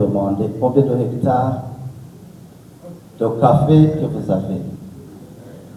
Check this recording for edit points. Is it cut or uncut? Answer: uncut